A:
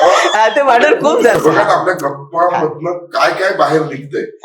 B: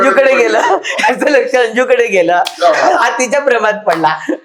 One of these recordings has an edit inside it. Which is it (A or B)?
A